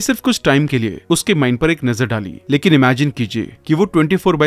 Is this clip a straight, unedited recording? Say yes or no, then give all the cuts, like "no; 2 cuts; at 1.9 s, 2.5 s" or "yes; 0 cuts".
yes; 0 cuts